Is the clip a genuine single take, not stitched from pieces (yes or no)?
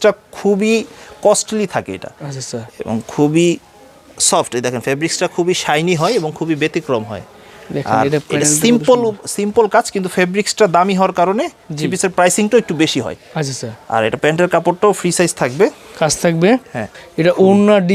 yes